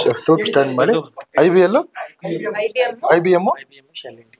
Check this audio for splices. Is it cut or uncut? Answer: uncut